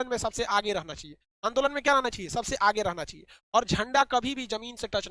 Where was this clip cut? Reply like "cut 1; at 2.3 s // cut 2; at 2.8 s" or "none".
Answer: none